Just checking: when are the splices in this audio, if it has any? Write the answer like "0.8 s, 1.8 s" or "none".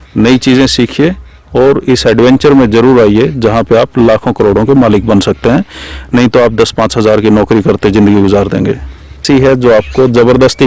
9.2 s

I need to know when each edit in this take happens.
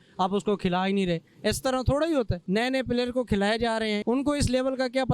2.4 s, 4.0 s

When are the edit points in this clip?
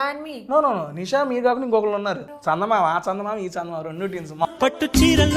2.3 s, 4.5 s

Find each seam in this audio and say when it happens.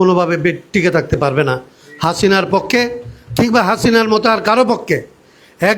none

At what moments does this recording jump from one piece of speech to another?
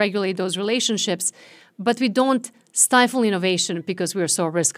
none

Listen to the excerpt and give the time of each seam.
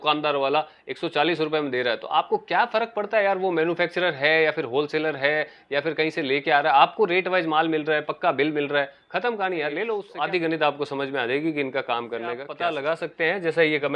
10.1 s, 12.5 s

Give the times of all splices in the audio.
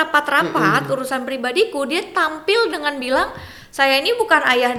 none

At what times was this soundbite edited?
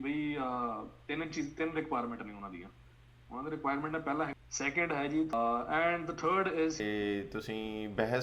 4.3 s, 5.3 s, 6.8 s

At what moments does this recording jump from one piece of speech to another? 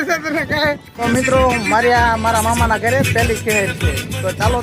1.0 s

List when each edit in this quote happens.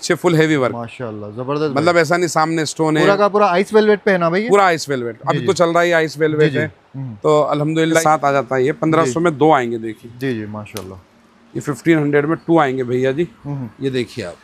8.0 s

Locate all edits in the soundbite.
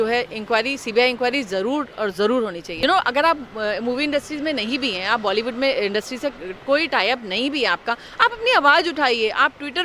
2.7 s

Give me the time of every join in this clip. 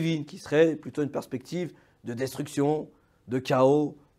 none

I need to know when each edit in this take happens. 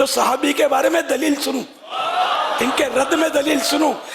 none

